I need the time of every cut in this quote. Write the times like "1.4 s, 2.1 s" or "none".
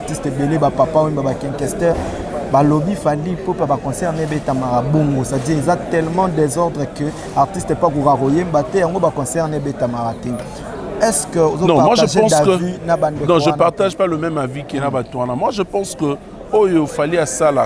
none